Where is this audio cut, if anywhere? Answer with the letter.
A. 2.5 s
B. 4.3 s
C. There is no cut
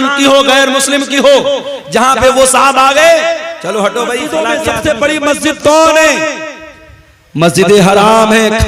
B